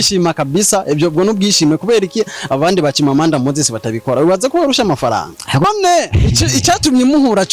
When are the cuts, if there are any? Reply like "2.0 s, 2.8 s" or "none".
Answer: 5.6 s